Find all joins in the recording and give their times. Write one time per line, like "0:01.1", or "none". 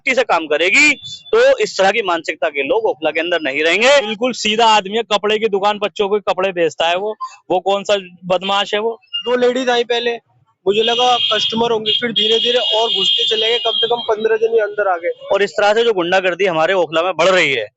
0:04.1
0:09.2
0:15.1